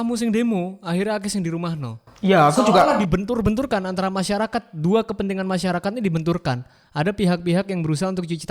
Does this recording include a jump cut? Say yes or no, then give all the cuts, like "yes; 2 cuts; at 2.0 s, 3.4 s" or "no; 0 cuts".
no; 0 cuts